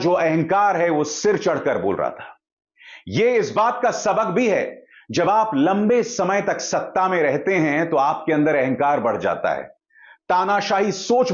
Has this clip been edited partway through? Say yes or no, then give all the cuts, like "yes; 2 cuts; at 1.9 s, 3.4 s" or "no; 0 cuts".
no; 0 cuts